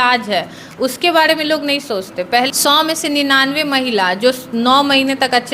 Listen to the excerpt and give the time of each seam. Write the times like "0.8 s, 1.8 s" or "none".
2.5 s